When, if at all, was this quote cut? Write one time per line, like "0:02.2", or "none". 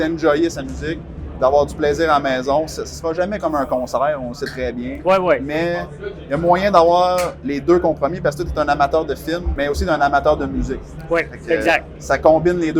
0:09.5